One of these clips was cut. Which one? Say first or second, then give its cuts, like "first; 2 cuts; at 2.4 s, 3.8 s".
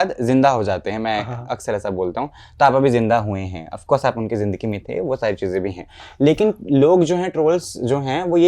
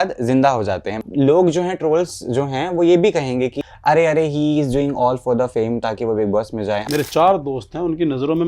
second; 3 cuts; at 1.0 s, 3.6 s, 6.8 s